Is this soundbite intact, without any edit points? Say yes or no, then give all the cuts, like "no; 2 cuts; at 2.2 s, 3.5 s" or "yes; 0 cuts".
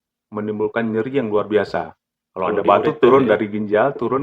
yes; 0 cuts